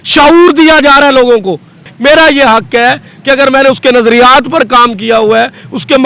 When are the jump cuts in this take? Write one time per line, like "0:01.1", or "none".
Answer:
0:01.9